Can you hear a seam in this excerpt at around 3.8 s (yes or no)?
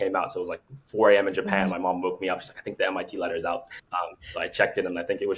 yes